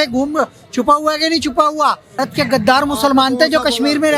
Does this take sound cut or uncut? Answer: cut